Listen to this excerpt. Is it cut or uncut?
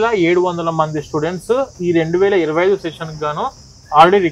uncut